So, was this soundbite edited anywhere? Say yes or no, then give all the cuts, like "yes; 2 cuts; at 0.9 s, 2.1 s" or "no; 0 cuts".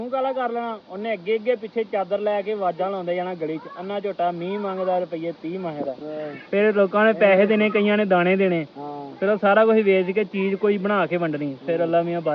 no; 0 cuts